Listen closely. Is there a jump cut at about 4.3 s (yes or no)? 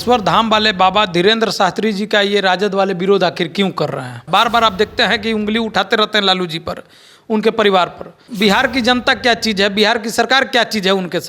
yes